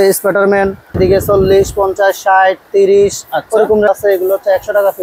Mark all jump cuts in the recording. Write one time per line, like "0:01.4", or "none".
0:01.0
0:03.9